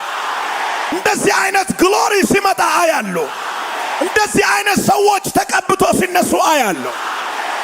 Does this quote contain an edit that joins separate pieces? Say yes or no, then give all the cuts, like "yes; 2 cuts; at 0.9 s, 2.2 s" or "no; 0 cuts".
yes; 1 cut; at 0.9 s